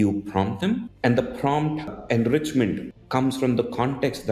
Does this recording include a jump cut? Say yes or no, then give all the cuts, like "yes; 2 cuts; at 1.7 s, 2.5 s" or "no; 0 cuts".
yes; 3 cuts; at 0.9 s, 2.0 s, 2.9 s